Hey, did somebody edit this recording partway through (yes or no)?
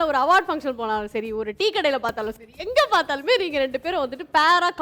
no